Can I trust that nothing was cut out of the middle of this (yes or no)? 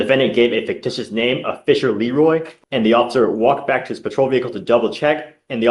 no